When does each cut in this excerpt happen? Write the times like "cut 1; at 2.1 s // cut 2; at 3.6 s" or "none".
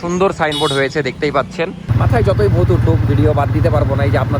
cut 1; at 1.8 s